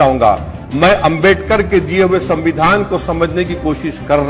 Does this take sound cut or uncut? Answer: uncut